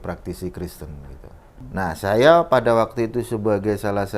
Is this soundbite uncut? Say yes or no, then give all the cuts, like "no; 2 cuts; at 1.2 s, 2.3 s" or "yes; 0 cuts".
no; 1 cut; at 1.5 s